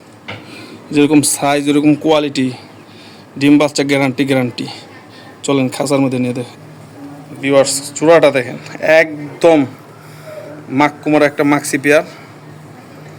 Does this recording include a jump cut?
no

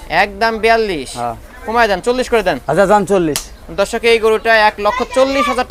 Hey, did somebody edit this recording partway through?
no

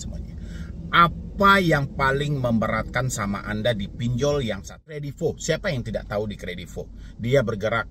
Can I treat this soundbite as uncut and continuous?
no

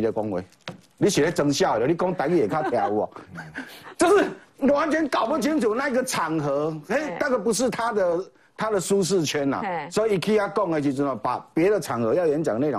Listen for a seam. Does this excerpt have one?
no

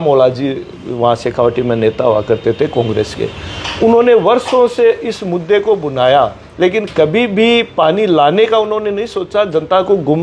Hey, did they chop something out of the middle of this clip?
no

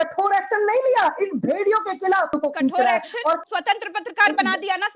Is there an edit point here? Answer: yes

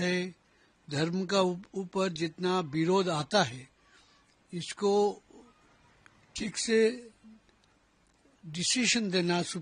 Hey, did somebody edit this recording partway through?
no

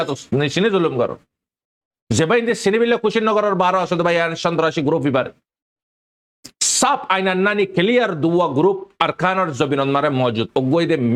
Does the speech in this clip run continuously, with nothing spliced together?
yes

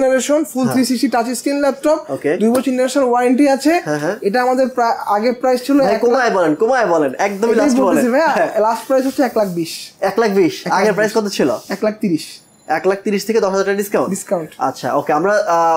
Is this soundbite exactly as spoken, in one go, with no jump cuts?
yes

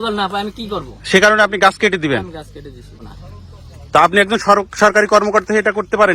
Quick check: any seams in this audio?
yes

